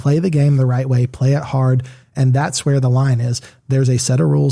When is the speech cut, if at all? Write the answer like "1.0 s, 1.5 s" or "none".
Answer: 2.2 s